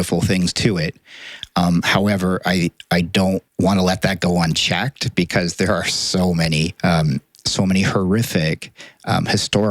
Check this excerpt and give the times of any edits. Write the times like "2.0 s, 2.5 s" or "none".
3.5 s, 6.7 s